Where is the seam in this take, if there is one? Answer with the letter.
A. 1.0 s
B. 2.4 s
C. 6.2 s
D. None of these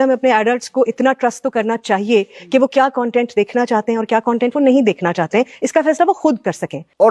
D